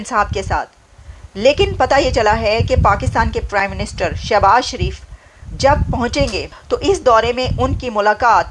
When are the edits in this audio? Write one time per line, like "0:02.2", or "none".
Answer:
0:06.5